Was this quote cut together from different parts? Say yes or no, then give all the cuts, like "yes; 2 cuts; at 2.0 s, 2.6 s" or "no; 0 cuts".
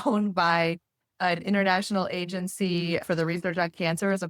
no; 0 cuts